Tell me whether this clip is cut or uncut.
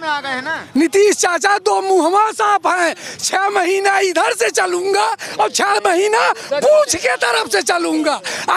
uncut